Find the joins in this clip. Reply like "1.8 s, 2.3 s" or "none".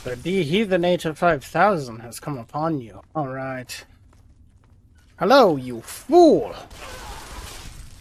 none